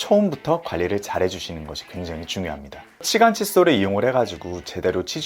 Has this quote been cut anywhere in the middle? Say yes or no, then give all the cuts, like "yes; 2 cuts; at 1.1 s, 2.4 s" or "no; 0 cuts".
yes; 1 cut; at 3.0 s